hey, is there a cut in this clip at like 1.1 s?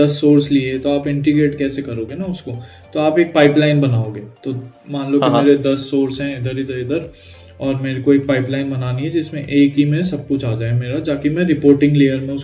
no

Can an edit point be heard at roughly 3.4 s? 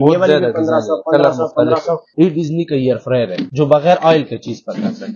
yes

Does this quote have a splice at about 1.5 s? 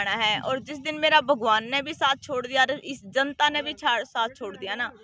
no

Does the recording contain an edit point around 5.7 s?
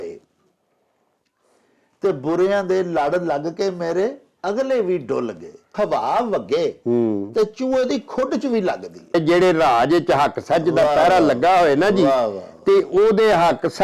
yes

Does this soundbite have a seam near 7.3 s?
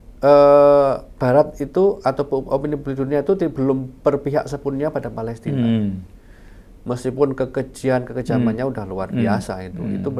no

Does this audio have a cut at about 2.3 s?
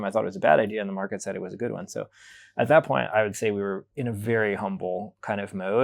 no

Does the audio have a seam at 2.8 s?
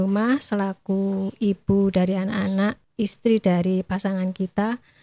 yes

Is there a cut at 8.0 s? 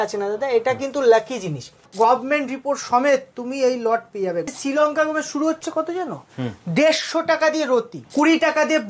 yes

